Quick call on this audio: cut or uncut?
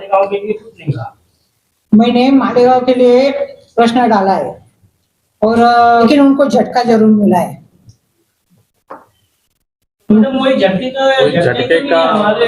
cut